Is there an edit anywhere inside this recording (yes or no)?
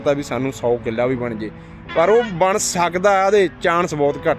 no